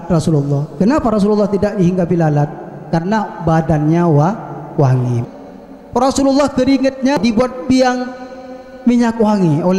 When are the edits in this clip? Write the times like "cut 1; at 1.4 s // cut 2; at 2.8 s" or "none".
cut 1; at 5.2 s // cut 2; at 7.2 s